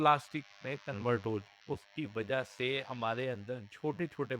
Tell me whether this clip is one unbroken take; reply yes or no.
no